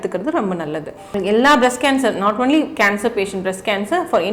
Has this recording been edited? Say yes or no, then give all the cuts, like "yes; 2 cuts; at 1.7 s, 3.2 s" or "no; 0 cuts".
yes; 1 cut; at 1.0 s